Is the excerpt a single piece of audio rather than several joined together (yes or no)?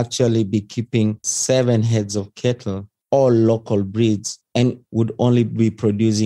no